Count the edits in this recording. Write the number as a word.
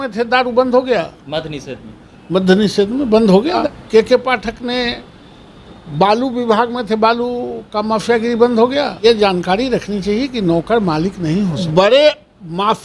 three